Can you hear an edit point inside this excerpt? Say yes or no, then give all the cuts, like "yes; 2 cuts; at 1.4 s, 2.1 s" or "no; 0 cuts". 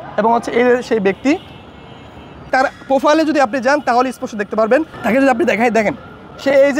no; 0 cuts